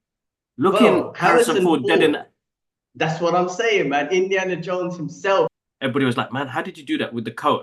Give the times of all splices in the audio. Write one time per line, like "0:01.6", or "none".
0:05.5